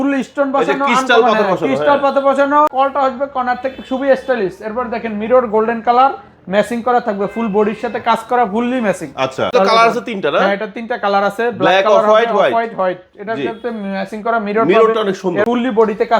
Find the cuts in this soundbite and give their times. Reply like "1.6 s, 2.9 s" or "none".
2.7 s, 9.5 s, 15.4 s